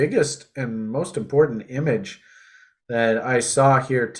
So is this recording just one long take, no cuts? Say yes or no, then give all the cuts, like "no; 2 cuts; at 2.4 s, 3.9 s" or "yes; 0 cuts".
yes; 0 cuts